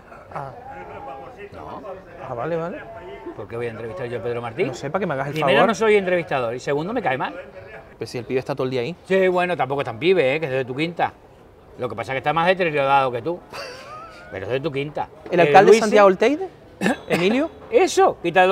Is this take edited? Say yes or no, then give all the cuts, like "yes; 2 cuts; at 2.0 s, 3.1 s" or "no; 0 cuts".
yes; 2 cuts; at 8.0 s, 15.2 s